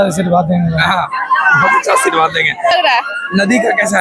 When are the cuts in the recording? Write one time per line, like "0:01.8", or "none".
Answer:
0:02.7